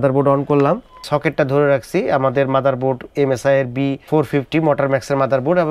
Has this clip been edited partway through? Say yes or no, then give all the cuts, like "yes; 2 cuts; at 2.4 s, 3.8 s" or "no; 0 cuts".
yes; 2 cuts; at 0.9 s, 4.1 s